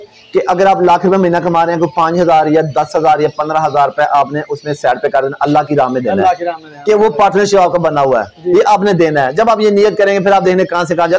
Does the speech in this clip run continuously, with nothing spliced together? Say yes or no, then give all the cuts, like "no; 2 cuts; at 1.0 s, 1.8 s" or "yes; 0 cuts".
yes; 0 cuts